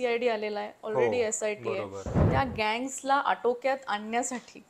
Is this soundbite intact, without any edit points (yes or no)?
no